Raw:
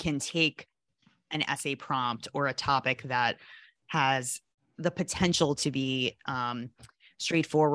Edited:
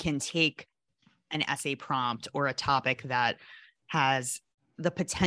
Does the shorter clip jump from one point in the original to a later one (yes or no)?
no